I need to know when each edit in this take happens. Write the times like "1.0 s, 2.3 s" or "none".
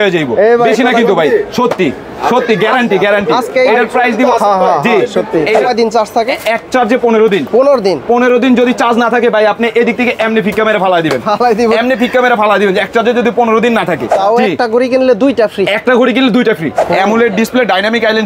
5.6 s, 14.1 s, 16.8 s